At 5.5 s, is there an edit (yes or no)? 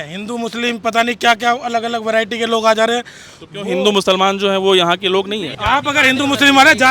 yes